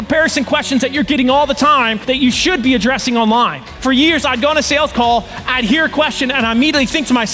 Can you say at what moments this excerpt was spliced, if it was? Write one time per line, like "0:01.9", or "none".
0:02.0
0:03.7